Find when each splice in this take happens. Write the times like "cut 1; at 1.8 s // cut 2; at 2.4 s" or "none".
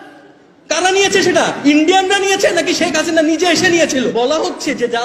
cut 1; at 4.1 s